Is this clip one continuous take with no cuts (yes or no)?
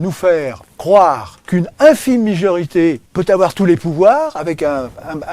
no